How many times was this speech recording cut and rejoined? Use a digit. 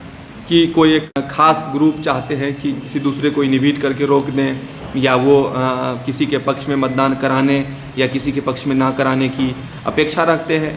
1